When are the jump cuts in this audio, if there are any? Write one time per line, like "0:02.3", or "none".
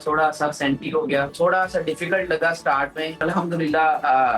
0:01.3
0:03.2